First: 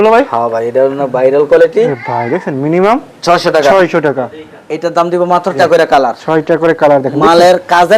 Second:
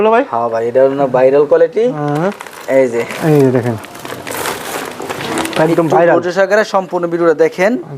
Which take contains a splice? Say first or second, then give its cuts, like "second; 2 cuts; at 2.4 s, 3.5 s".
first; 2 cuts; at 1.9 s, 5.6 s